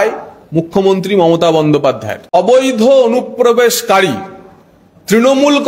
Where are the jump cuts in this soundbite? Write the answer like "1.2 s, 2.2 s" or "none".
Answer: 2.3 s

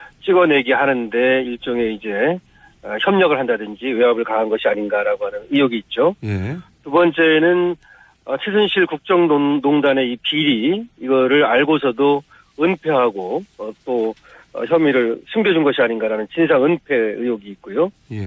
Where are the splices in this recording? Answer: none

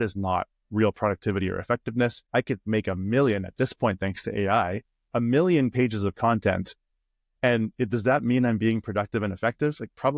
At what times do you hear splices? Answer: 2.2 s

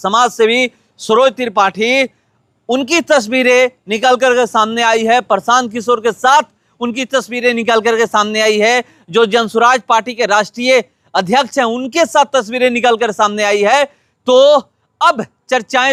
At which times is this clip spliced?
none

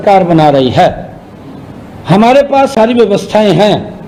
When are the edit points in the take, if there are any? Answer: none

